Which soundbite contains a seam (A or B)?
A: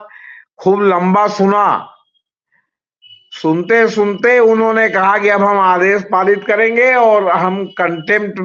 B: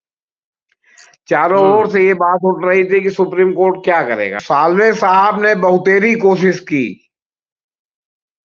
B